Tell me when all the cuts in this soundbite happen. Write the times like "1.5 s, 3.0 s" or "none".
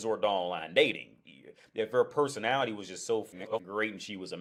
none